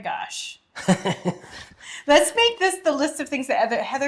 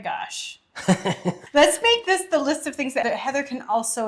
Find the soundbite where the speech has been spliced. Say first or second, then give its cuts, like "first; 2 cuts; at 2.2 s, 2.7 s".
second; 2 cuts; at 1.4 s, 3.0 s